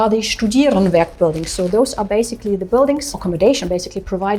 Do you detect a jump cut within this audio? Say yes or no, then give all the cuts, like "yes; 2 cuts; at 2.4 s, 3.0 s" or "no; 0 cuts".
no; 0 cuts